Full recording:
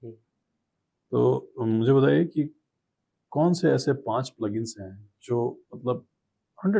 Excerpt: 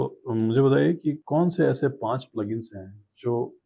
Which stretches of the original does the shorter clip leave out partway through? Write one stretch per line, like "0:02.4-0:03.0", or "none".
0:02.5-0:03.3